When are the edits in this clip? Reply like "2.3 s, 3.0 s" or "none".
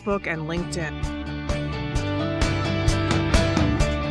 0.9 s